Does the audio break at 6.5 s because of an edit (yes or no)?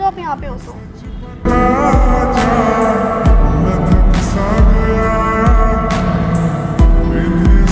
no